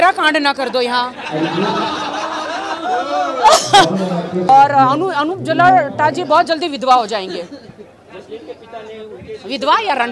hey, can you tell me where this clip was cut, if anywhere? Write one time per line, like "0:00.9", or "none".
0:04.5